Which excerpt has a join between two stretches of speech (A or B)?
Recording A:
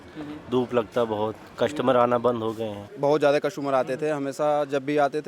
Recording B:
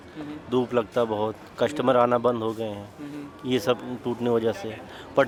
A